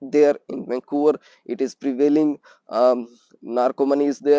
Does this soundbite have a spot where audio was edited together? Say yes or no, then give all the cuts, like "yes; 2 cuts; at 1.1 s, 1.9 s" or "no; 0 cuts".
no; 0 cuts